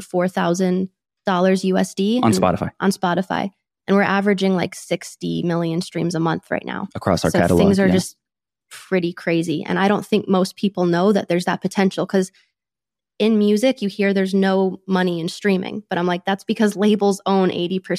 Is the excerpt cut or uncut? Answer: uncut